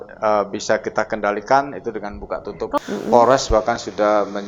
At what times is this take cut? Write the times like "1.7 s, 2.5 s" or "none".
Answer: 2.8 s

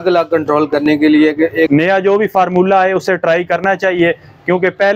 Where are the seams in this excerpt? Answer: 1.7 s

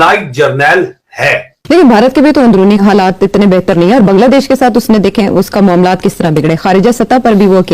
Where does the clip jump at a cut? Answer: 1.6 s

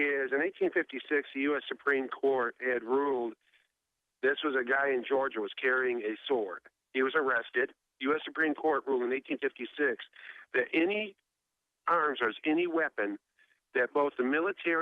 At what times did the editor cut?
2.0 s

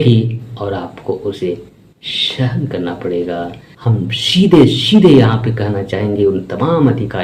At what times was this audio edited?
4.1 s

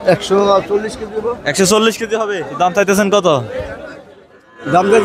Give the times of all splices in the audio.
2.4 s

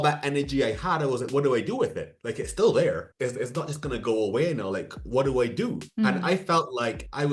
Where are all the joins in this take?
3.1 s, 5.8 s

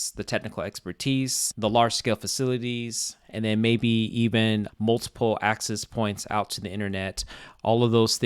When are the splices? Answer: 4.7 s

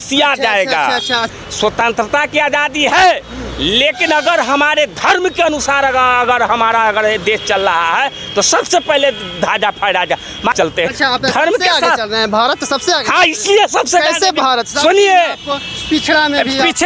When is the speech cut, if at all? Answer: 1.3 s, 10.5 s

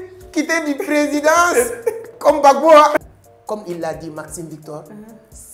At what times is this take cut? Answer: 3.0 s

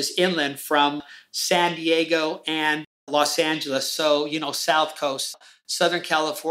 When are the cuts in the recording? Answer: none

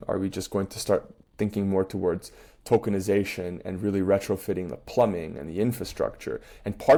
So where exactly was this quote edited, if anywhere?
none

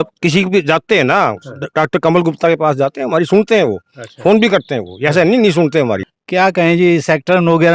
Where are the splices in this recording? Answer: 6.1 s

